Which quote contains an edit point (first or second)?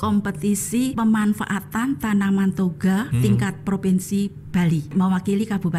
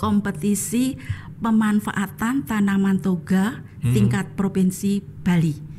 first